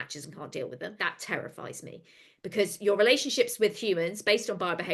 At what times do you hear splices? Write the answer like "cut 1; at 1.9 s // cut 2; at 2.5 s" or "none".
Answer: cut 1; at 1.0 s